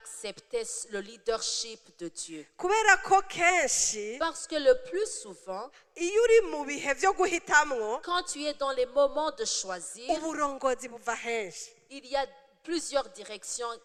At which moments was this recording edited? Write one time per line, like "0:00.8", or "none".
none